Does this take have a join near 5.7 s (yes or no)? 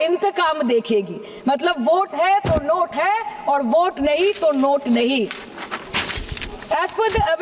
no